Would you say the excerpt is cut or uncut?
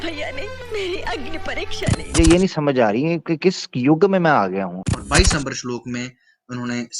cut